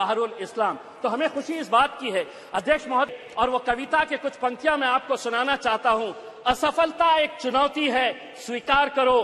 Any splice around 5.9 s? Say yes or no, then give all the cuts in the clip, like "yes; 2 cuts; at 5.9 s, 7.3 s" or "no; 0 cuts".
no; 1 cut; at 3.1 s